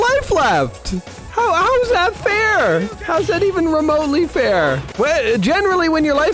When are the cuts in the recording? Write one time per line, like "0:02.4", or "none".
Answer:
0:01.2
0:04.9